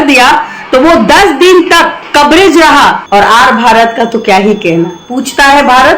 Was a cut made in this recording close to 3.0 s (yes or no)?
yes